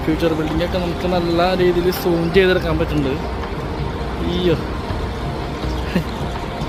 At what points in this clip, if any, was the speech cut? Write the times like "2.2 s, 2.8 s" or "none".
none

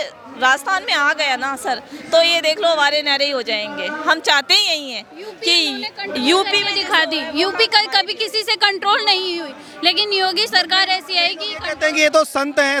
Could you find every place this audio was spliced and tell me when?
none

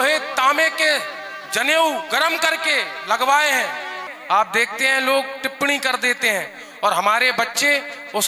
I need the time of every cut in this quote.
4.1 s

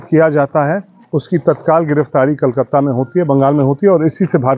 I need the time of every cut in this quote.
none

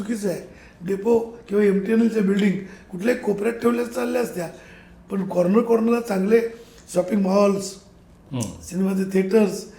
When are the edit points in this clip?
none

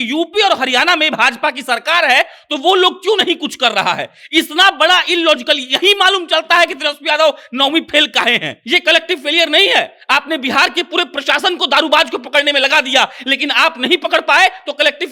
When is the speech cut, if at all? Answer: 8.5 s

